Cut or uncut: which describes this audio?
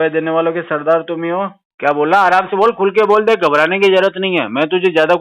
cut